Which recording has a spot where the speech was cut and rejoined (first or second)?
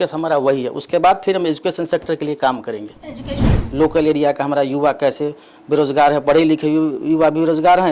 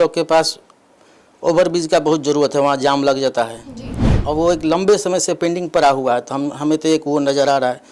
first